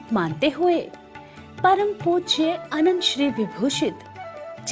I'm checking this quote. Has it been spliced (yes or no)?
yes